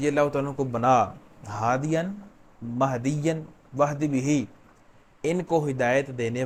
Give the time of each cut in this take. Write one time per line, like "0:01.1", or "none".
none